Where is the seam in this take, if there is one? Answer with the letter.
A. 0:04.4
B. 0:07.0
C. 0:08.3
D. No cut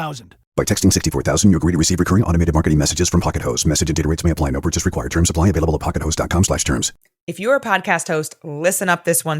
B